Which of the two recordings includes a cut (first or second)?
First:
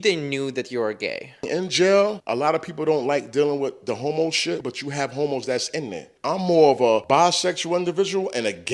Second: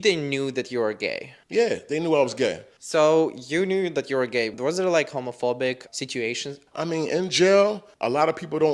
first